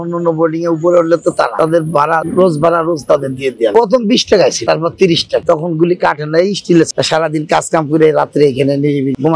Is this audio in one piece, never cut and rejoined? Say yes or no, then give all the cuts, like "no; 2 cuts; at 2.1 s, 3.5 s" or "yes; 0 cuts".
no; 2 cuts; at 4.6 s, 6.9 s